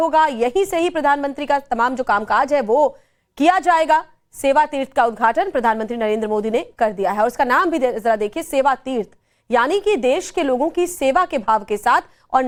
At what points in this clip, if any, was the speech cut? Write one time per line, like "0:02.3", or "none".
none